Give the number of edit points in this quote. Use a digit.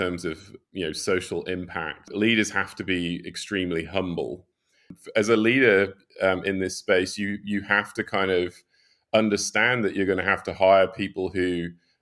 2